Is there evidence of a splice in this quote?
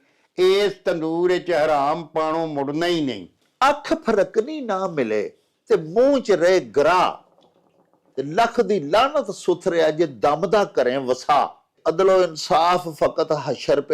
yes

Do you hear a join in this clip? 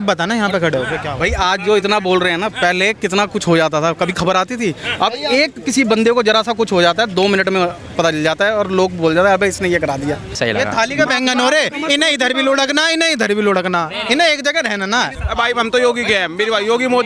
yes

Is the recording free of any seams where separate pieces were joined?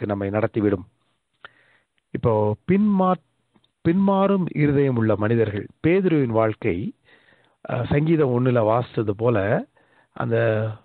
yes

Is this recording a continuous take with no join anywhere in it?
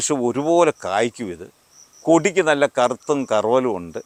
yes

